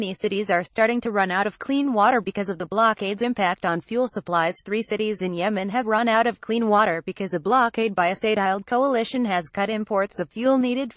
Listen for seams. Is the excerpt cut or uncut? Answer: cut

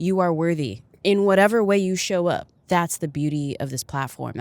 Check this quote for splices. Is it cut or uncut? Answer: cut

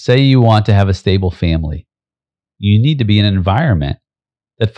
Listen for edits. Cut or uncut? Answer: uncut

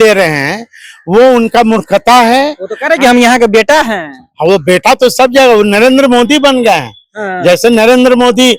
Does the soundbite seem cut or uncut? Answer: uncut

